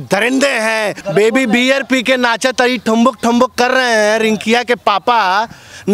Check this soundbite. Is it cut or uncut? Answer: cut